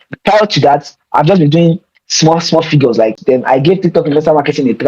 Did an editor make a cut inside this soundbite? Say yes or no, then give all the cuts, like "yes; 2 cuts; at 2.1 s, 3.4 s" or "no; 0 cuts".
yes; 1 cut; at 3.2 s